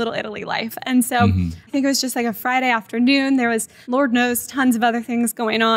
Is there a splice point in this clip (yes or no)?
yes